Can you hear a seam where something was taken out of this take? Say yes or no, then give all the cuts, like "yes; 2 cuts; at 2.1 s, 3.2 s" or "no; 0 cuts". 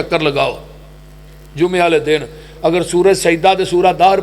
no; 0 cuts